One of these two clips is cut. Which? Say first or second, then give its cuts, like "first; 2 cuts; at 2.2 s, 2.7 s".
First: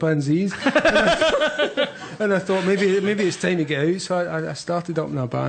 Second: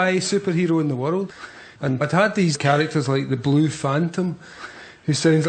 first; 1 cut; at 3.2 s